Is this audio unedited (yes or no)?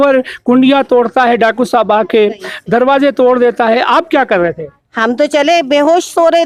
yes